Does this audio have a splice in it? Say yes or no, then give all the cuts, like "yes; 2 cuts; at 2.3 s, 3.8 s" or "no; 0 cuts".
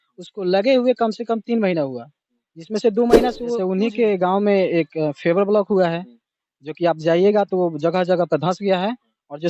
yes; 1 cut; at 3.5 s